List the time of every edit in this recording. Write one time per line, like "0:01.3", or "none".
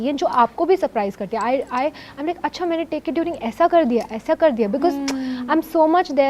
none